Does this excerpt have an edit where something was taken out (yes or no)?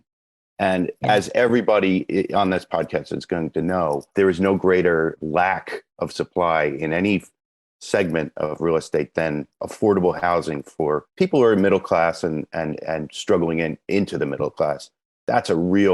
no